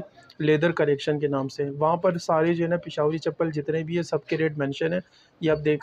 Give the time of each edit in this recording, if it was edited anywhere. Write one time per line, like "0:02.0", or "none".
none